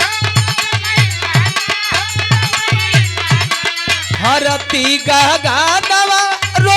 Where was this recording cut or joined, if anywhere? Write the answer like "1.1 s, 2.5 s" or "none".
4.2 s